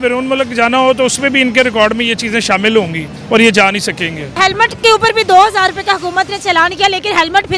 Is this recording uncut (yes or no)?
no